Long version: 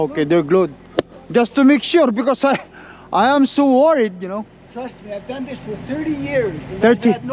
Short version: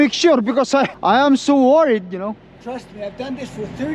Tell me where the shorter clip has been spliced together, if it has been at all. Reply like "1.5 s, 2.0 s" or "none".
0.9 s